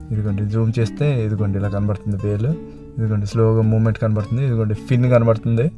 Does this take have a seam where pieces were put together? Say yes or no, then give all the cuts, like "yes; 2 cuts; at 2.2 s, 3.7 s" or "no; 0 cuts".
no; 0 cuts